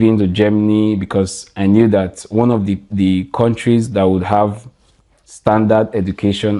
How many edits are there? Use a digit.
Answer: 1